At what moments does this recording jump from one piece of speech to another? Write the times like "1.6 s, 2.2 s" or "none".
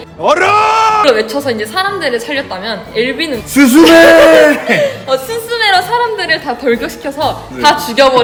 none